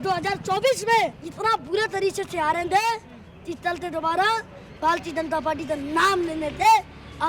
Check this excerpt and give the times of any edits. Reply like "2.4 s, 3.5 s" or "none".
1.2 s

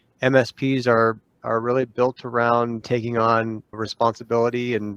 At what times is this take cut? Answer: none

